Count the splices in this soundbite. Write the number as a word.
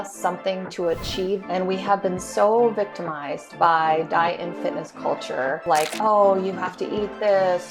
one